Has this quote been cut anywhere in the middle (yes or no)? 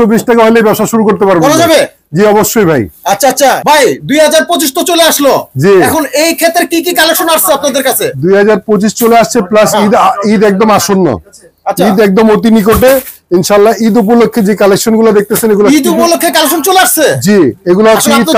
no